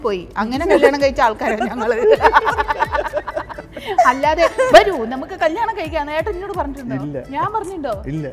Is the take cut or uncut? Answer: uncut